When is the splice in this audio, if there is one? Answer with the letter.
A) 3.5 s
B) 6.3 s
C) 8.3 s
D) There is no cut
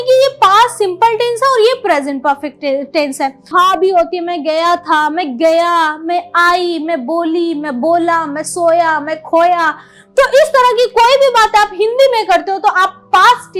A